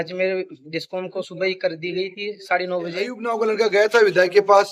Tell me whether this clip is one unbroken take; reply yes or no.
no